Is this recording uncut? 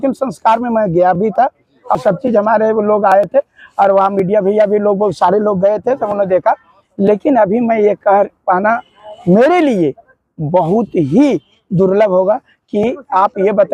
yes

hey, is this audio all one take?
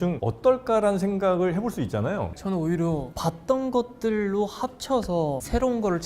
no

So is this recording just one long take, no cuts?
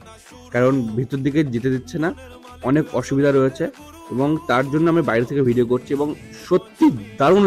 yes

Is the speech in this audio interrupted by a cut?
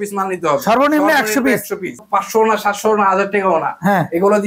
yes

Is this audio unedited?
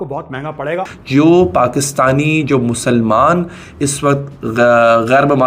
no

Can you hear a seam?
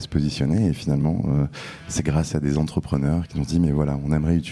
yes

